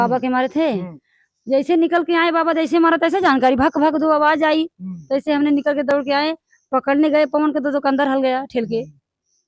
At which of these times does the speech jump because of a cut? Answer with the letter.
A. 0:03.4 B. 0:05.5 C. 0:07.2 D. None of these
D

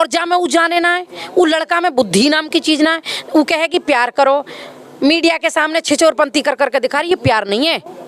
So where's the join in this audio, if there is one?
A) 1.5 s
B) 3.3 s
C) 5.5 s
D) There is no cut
D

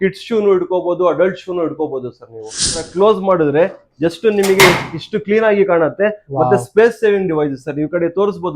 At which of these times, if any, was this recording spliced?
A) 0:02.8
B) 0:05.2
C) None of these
A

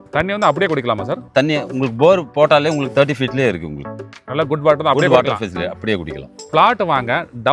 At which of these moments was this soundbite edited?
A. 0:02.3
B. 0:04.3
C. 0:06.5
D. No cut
C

